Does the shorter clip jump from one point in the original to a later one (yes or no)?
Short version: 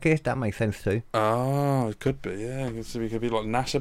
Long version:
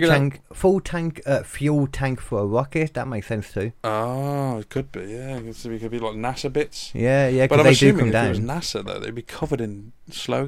no